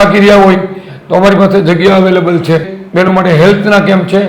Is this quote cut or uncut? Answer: cut